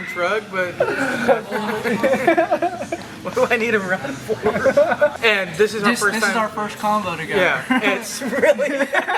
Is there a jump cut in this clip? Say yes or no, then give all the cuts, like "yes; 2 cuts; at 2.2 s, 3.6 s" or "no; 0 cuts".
yes; 2 cuts; at 1.3 s, 5.2 s